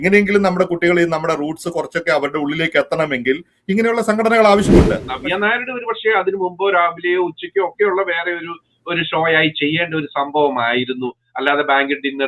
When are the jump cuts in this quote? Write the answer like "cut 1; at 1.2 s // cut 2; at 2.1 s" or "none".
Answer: cut 1; at 5.0 s